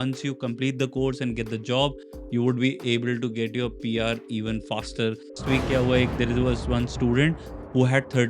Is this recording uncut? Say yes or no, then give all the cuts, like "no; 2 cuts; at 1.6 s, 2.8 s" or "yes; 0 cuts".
no; 1 cut; at 5.4 s